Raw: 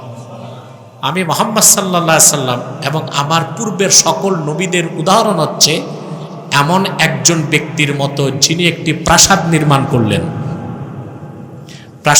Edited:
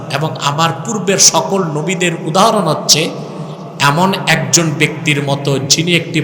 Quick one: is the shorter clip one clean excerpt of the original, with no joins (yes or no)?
yes